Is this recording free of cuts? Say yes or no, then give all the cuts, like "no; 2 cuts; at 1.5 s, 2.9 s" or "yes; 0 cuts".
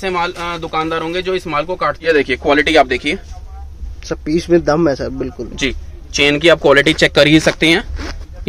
no; 1 cut; at 2.0 s